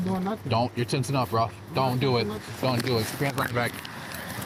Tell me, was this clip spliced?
no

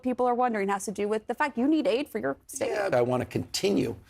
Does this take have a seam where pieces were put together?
yes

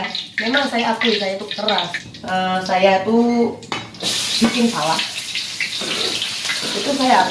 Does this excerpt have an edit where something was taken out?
yes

